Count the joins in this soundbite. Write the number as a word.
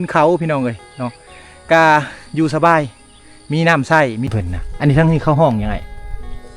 one